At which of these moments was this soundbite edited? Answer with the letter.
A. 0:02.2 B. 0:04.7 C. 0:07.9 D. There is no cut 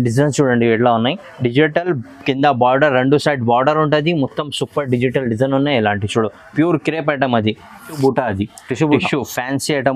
C